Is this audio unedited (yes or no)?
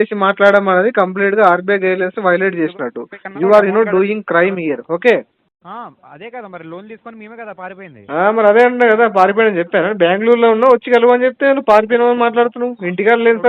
no